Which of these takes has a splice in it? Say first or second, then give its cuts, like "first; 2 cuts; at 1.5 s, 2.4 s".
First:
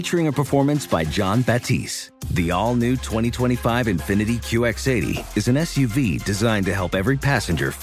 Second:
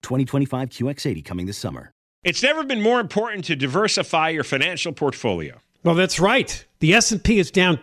second; 1 cut; at 2.1 s